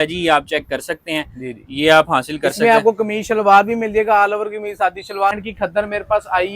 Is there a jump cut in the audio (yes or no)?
yes